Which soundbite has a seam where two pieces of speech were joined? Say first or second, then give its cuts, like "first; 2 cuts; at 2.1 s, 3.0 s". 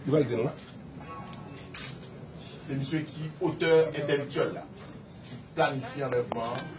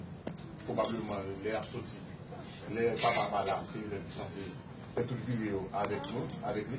second; 1 cut; at 1.3 s